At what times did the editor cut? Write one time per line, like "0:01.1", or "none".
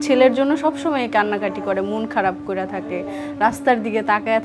none

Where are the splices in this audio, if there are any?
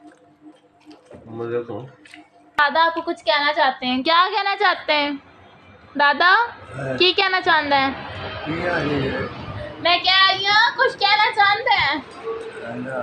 0:02.6
0:09.7

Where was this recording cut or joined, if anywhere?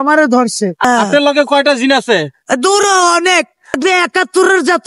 0:00.8
0:03.8

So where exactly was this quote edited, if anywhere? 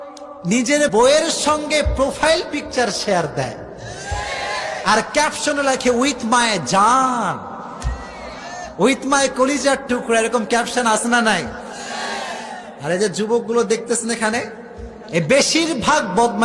0:00.9

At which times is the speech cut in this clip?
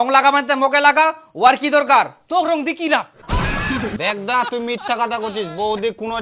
0:03.9

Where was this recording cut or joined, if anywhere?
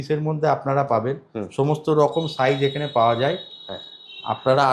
none

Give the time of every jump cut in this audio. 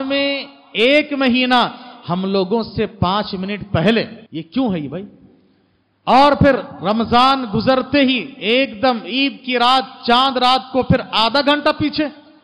0:04.2

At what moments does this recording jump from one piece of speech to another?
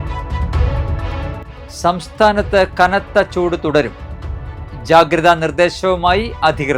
0:01.6

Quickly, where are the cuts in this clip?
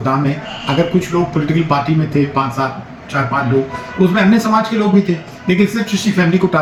none

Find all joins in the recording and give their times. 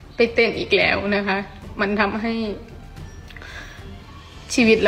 0:01.7

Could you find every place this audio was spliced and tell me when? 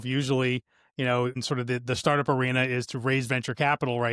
0:01.3

